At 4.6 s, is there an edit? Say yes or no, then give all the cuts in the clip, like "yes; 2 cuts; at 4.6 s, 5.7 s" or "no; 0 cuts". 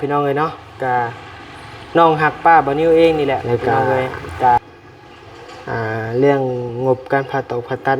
yes; 1 cut; at 4.6 s